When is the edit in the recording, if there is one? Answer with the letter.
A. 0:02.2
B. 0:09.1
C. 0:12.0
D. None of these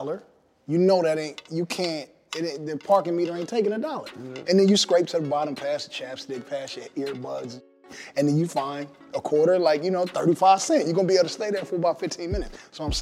D